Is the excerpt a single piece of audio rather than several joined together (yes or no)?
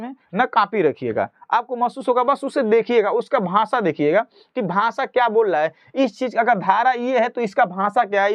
yes